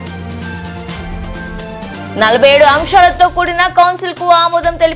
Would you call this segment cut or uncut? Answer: cut